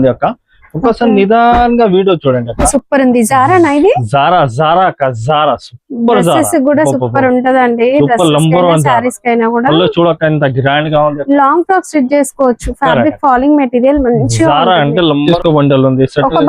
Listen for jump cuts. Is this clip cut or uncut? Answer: cut